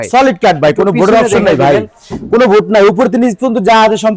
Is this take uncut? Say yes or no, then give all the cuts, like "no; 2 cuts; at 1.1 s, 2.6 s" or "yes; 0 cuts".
yes; 0 cuts